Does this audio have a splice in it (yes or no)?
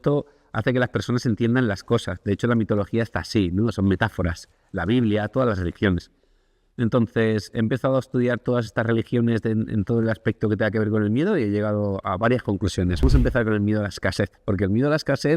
yes